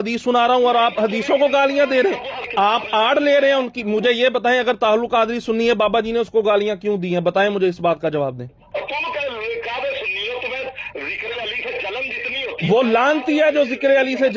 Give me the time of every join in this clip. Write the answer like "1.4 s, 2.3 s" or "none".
2.4 s, 8.5 s